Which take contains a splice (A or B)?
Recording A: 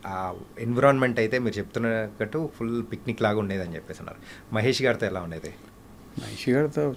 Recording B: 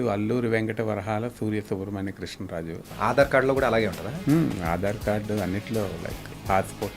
B